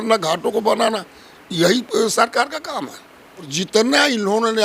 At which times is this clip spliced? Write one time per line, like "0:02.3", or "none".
0:03.5